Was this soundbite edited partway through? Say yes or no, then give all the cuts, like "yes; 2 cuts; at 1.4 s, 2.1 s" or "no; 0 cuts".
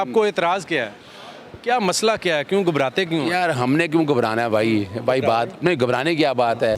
no; 0 cuts